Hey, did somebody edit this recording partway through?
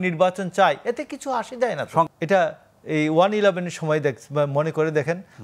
yes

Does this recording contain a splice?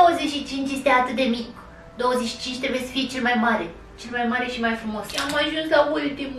yes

